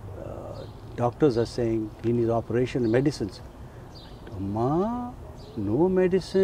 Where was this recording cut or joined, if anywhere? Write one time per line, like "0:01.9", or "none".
none